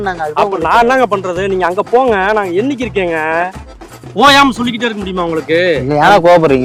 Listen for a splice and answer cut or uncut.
uncut